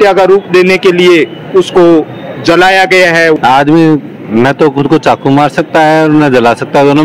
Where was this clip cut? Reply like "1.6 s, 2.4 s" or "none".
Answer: 3.4 s